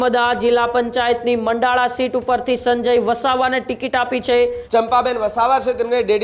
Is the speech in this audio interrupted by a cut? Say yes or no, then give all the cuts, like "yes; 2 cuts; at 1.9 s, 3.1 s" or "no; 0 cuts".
yes; 1 cut; at 4.6 s